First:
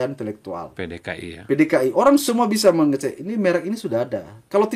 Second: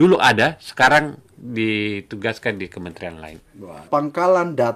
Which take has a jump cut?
second; 1 cut; at 3.8 s

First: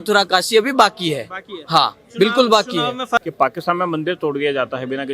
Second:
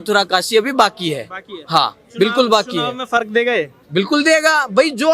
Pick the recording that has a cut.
first; 1 cut; at 3.2 s

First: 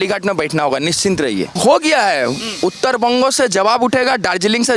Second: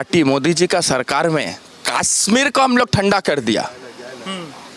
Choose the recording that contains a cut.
first; 1 cut; at 1.5 s

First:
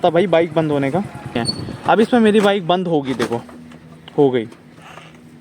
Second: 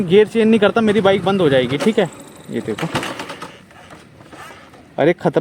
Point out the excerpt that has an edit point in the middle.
first; 1 cut; at 1.4 s

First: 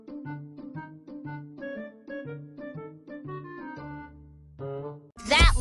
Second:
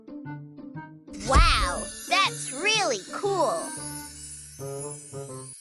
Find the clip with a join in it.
first; 2 cuts; at 1.0 s, 4.0 s

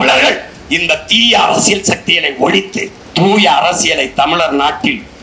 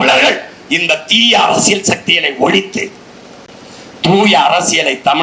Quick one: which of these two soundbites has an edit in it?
first; 1 cut; at 3.0 s

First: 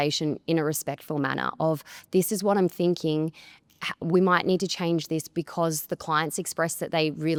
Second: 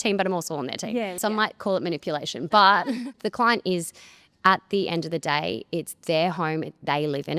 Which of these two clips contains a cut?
second; 2 cuts; at 1.2 s, 3.1 s

